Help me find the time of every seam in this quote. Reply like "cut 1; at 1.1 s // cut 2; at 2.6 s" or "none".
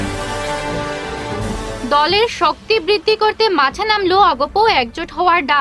cut 1; at 1.4 s

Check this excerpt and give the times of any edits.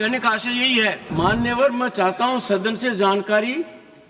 cut 1; at 1.0 s

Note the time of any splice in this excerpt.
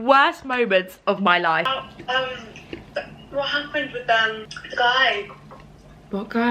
cut 1; at 1.6 s // cut 2; at 4.5 s

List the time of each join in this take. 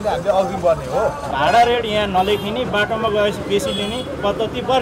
cut 1; at 1.3 s

